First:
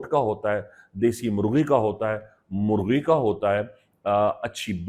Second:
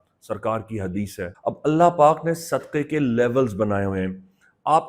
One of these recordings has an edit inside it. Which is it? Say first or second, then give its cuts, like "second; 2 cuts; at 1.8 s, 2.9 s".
second; 1 cut; at 1.3 s